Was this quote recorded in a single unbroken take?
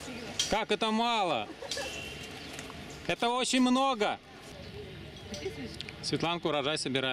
no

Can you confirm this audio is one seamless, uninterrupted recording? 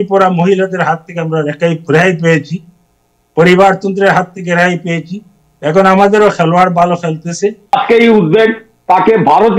no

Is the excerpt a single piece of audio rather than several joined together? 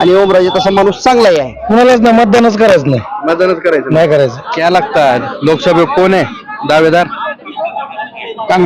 no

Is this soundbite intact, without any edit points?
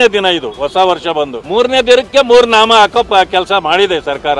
no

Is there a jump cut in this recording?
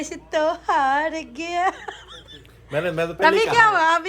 yes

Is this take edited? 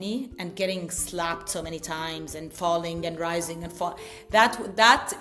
no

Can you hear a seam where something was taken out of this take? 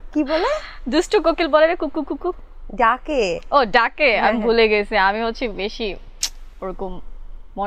no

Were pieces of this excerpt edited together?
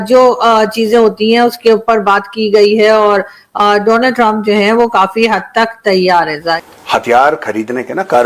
yes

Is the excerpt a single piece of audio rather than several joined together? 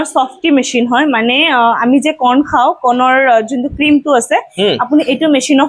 yes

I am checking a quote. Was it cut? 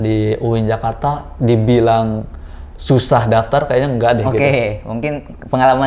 no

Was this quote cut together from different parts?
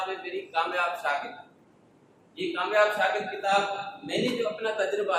no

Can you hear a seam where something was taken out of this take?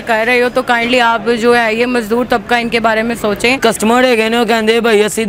yes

